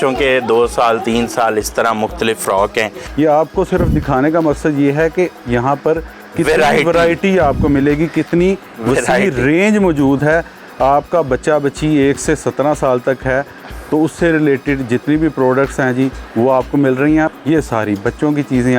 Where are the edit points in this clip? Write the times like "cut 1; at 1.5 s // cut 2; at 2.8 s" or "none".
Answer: cut 1; at 3.0 s // cut 2; at 17.3 s